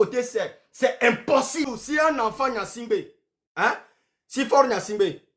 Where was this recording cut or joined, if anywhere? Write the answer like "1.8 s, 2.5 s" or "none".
1.7 s